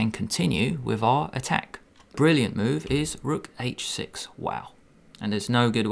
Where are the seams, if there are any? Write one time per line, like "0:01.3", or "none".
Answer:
0:02.1